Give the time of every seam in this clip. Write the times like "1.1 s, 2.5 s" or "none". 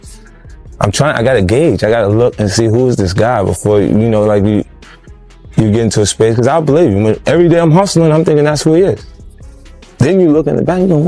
none